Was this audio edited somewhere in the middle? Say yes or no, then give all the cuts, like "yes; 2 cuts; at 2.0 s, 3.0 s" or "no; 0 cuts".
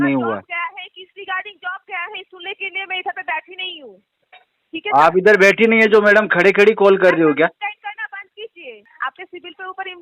yes; 1 cut; at 8.9 s